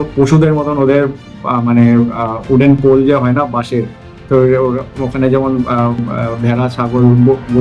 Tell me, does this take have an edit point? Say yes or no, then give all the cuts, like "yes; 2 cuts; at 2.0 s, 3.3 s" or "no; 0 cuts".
no; 0 cuts